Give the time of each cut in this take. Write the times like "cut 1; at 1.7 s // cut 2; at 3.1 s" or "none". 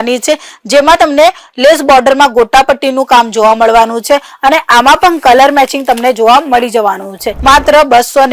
cut 1; at 7.2 s